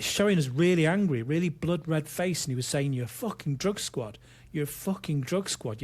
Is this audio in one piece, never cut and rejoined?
yes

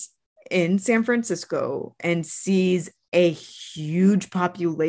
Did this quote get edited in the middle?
no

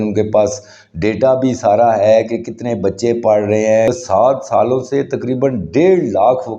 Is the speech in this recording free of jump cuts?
no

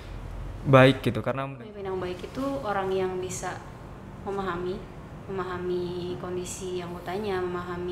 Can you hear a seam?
yes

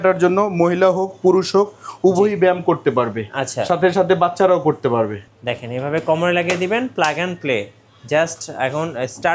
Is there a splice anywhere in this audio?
yes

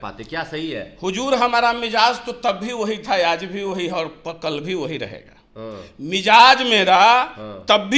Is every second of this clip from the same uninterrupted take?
yes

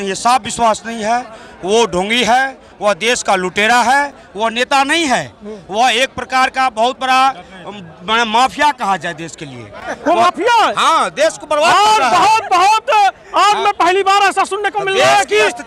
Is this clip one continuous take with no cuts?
yes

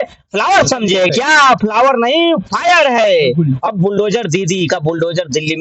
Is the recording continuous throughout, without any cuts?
yes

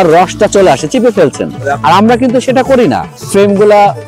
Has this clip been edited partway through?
yes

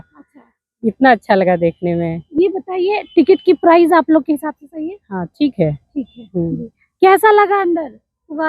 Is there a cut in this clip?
no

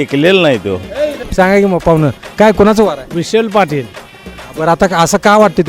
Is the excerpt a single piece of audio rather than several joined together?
no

